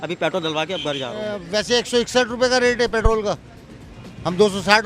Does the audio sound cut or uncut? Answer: cut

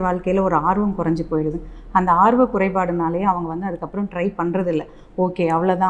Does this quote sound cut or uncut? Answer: uncut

